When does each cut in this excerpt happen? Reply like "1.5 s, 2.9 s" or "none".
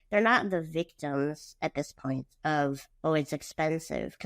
2.9 s